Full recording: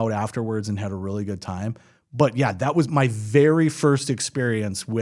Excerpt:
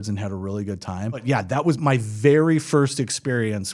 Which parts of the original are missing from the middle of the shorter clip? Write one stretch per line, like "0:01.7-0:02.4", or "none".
0:01.8-0:02.3